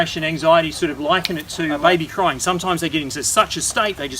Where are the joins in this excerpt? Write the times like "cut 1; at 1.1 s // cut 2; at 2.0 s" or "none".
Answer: cut 1; at 1.8 s